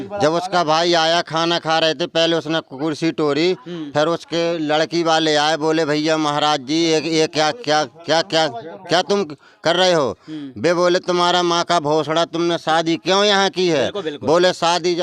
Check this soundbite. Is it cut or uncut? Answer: uncut